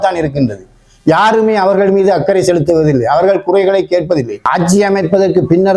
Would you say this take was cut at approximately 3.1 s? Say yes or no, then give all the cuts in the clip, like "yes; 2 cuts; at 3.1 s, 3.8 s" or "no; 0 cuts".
no; 1 cut; at 4.4 s